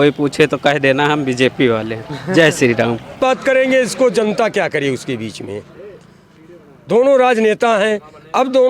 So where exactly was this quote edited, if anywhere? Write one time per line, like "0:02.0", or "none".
0:03.2